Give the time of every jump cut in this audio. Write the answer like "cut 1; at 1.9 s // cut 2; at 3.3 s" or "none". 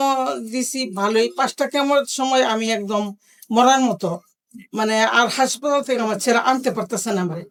none